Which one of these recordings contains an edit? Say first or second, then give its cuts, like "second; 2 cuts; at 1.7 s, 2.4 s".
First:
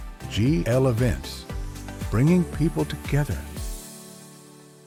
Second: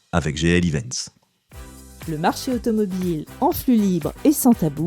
second; 1 cut; at 1.2 s